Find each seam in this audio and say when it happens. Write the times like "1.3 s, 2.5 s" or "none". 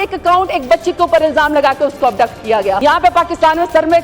2.8 s

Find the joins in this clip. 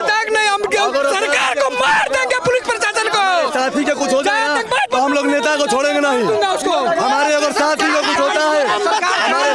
none

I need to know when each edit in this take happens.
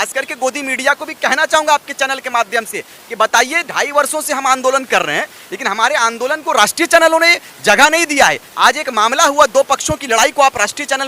none

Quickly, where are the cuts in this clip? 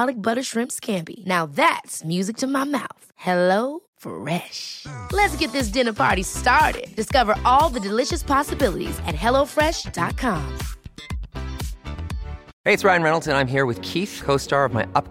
12.4 s

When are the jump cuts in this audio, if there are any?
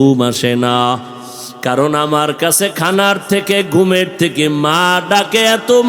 none

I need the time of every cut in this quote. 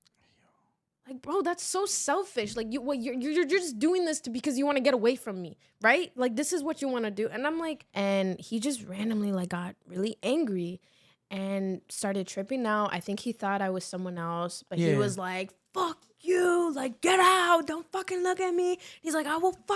7.8 s

